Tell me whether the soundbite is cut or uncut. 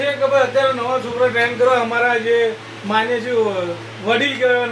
uncut